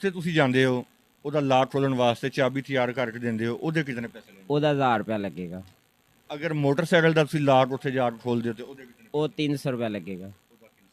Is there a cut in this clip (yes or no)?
no